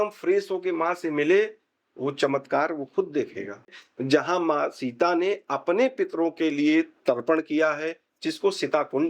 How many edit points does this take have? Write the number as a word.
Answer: one